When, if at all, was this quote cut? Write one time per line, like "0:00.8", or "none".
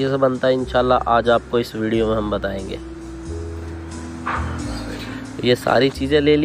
none